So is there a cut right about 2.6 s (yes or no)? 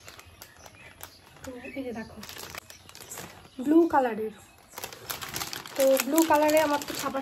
yes